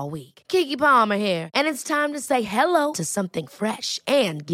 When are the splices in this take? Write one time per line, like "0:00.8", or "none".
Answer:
none